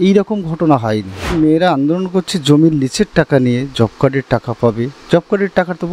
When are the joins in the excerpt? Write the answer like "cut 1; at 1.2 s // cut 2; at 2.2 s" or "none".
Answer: cut 1; at 1.3 s